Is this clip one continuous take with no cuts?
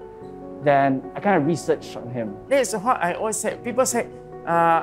no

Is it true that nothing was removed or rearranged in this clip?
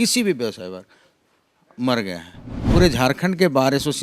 no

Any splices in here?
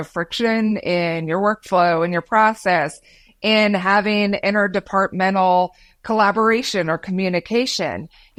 no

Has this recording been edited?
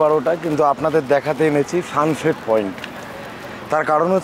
no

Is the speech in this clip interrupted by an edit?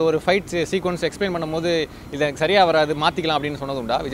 no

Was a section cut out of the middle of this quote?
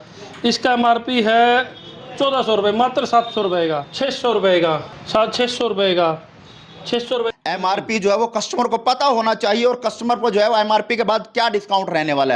yes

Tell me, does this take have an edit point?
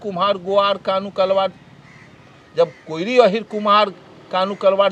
no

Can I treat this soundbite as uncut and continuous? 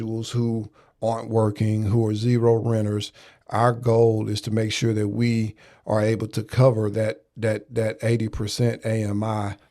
yes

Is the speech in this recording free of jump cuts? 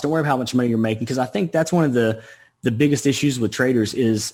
yes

